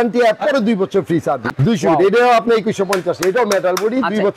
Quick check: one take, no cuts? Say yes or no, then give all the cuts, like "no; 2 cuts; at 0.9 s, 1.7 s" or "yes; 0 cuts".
no; 1 cut; at 1.5 s